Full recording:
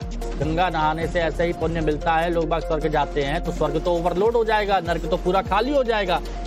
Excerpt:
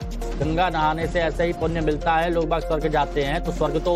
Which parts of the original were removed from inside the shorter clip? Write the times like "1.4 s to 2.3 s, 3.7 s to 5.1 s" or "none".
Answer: none